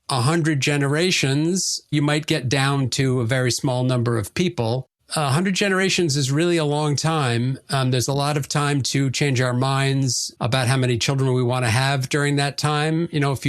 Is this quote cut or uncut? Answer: uncut